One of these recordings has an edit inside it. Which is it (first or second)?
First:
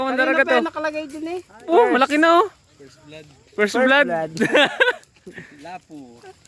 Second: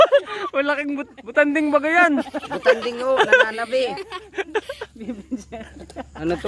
first